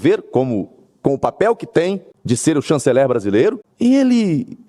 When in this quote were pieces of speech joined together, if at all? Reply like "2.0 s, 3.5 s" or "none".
2.1 s, 3.7 s